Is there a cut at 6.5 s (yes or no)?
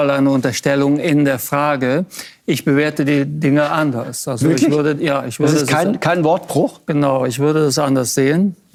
no